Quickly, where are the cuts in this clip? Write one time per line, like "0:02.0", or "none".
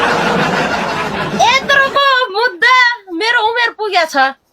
0:00.9